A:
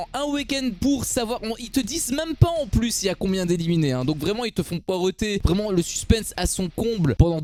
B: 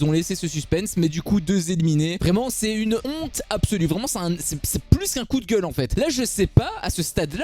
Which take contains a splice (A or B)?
B